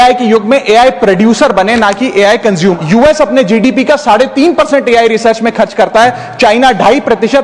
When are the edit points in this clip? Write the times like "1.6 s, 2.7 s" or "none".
2.8 s